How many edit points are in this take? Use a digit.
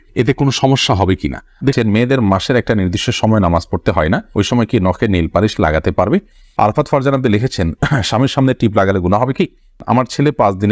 3